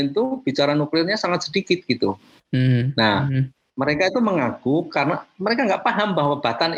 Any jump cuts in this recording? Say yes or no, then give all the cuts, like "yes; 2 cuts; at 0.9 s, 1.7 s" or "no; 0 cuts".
no; 0 cuts